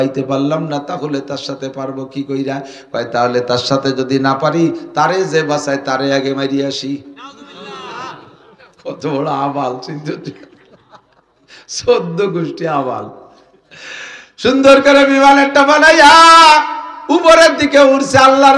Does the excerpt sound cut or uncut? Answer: uncut